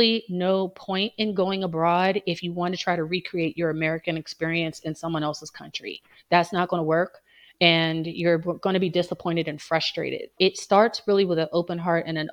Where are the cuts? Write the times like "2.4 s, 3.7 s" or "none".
none